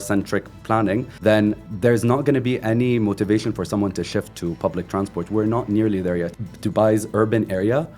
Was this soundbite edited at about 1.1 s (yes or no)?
yes